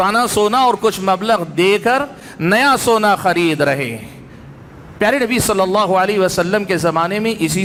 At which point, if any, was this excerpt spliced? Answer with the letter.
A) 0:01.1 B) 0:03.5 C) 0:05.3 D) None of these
D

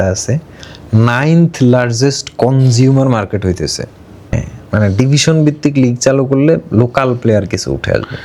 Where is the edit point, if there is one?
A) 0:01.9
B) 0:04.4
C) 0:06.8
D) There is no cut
B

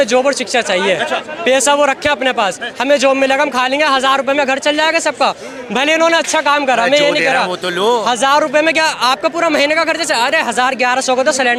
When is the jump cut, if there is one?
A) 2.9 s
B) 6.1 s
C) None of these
C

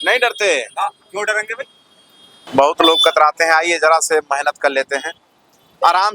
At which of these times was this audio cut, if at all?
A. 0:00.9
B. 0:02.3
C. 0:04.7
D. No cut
B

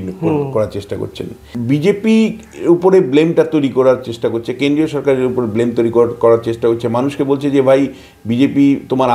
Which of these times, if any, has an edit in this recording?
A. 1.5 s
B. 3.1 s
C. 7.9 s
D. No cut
A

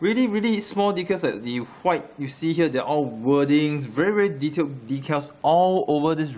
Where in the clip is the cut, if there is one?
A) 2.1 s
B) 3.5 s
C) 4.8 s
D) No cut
B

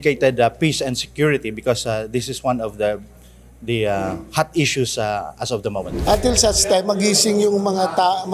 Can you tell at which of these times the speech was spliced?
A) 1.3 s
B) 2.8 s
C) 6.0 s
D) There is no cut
C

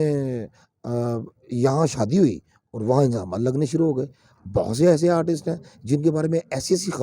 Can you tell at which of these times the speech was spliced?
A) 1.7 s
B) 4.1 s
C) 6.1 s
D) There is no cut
D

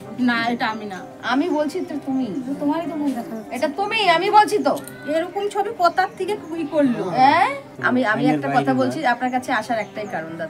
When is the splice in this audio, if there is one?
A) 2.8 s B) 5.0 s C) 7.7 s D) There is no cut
C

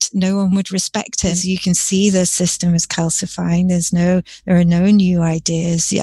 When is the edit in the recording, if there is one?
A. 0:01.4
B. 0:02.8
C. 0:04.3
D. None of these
A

